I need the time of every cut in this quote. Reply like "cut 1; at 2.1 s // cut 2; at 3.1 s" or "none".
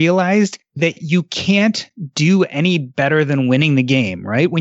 none